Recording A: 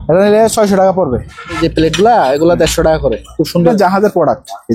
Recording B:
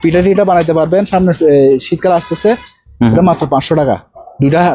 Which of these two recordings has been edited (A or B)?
A